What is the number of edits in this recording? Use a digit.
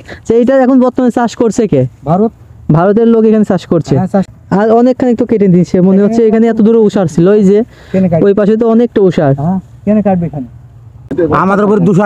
2